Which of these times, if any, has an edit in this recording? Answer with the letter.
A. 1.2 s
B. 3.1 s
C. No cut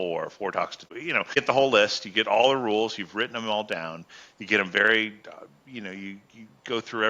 A